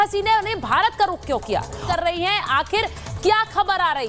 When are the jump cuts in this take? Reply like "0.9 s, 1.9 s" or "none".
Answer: 1.8 s